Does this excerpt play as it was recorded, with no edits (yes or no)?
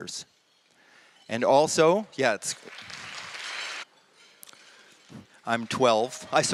yes